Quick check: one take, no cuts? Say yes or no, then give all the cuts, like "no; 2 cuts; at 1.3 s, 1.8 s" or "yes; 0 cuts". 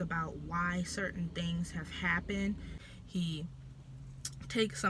no; 1 cut; at 2.8 s